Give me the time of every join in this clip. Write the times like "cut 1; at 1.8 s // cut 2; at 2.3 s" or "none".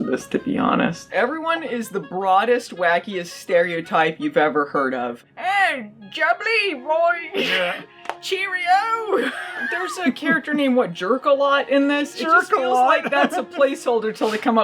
cut 1; at 1.0 s // cut 2; at 5.2 s // cut 3; at 9.6 s

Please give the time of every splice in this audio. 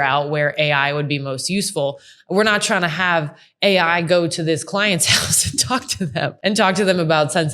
cut 1; at 6.4 s

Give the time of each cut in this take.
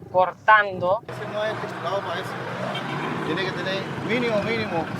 cut 1; at 1.1 s

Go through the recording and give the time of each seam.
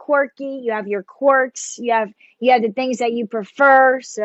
none

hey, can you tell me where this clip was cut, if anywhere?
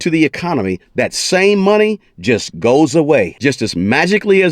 cut 1; at 3.3 s

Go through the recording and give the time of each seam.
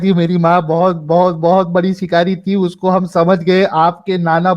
none

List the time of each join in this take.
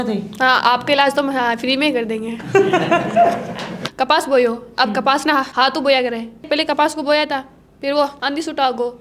cut 1; at 3.8 s // cut 2; at 6.4 s // cut 3; at 8.2 s

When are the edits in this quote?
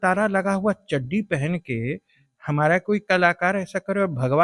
none

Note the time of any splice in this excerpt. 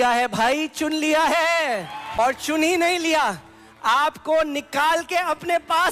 cut 1; at 2.2 s

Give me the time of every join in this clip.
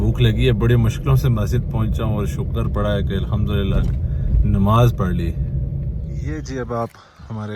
cut 1; at 6.2 s

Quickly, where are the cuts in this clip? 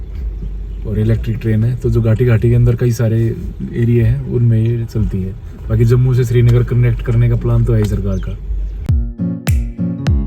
cut 1; at 8.9 s

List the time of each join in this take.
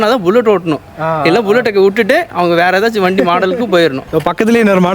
cut 1; at 4.0 s

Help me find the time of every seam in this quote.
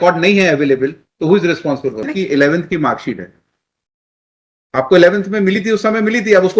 cut 1; at 2.1 s

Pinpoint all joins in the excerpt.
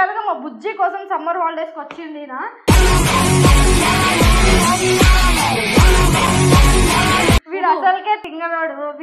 cut 1; at 2.5 s // cut 2; at 7.4 s

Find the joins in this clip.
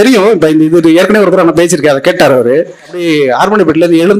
cut 1; at 3.1 s

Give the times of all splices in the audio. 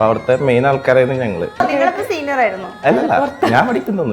cut 1; at 1.6 s

